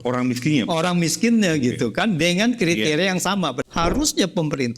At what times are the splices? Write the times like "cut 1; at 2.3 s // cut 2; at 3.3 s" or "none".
cut 1; at 3.6 s